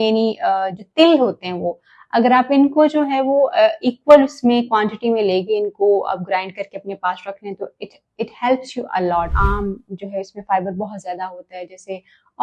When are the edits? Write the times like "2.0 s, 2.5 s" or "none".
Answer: 9.3 s